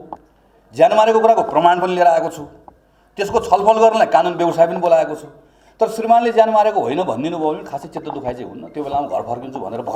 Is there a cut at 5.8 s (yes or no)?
no